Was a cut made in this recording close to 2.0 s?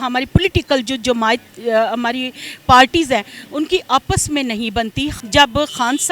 no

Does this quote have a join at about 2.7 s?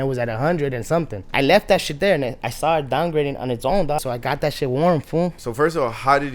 no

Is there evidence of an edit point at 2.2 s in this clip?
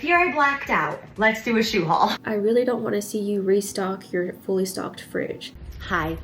yes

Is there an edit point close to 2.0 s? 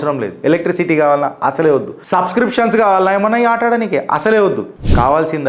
yes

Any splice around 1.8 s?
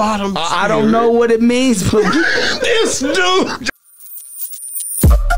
no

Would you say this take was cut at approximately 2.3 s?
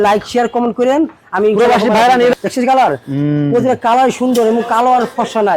yes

